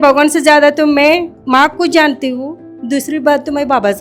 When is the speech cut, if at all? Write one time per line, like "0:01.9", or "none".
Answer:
0:01.3